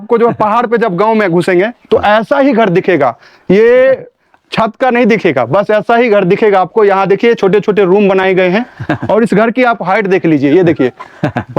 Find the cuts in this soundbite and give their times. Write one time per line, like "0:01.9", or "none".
none